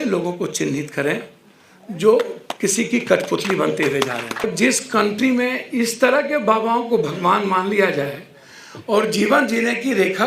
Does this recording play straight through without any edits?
no; 1 cut; at 4.4 s

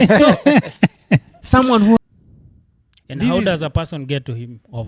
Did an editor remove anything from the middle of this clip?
yes; 1 cut; at 2.0 s

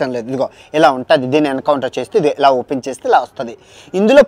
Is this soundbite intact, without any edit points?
yes; 0 cuts

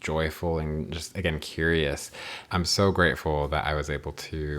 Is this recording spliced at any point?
yes; 1 cut; at 2.4 s

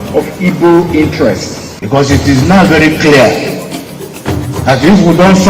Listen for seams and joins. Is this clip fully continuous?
no; 1 cut; at 3.0 s

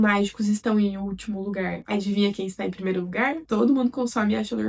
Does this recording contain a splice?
yes; 1 cut; at 3.4 s

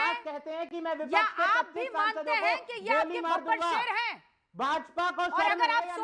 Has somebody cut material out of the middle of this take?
no; 0 cuts

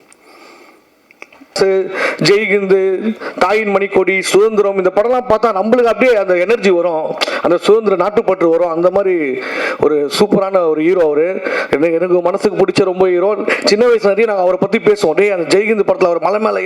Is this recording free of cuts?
no; 1 cut; at 1.5 s

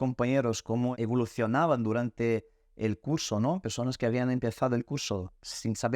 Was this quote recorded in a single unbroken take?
no; 1 cut; at 0.9 s

